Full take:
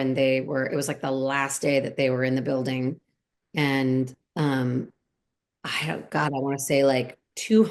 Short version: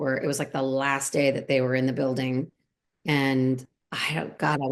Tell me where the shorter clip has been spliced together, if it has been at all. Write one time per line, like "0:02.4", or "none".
0:03.7